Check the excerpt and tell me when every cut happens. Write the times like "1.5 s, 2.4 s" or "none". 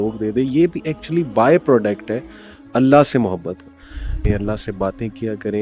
4.2 s